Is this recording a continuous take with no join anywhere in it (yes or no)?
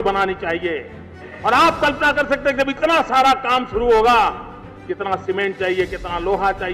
no